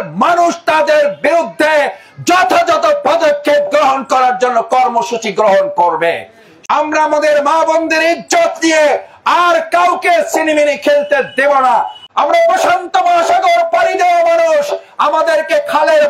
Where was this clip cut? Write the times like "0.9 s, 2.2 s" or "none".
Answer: 6.5 s, 12.0 s